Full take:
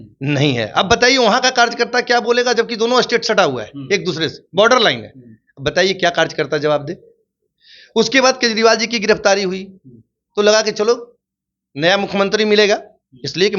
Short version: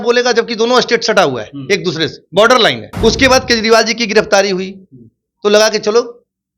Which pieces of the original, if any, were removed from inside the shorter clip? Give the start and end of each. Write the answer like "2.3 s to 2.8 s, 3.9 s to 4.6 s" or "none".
5.1 s to 7.8 s